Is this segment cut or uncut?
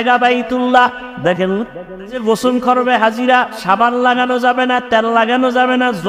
cut